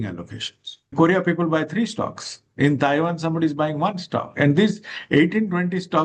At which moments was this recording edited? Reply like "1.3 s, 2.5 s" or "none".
0.9 s

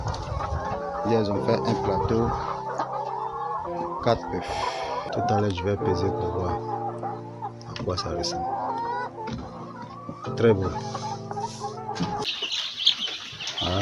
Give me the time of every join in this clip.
12.2 s

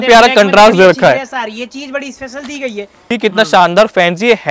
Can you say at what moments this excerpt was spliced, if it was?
3.1 s

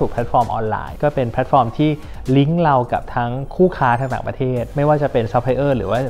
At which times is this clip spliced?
0.9 s

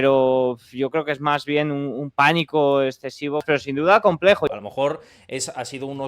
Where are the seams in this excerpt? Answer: 3.4 s, 4.5 s

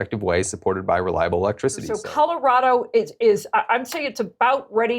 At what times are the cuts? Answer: 1.9 s

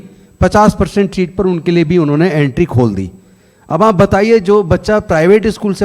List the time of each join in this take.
none

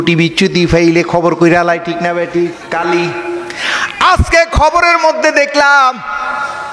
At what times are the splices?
2.6 s

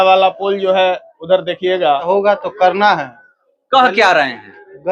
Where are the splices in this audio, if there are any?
2.1 s

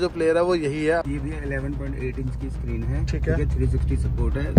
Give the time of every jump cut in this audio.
1.0 s

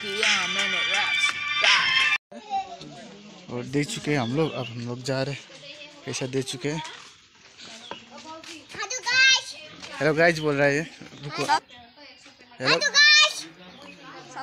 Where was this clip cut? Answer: 2.2 s

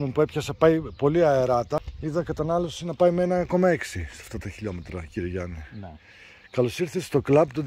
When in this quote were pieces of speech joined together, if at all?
1.9 s

